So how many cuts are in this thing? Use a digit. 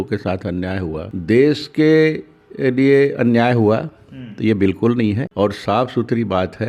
0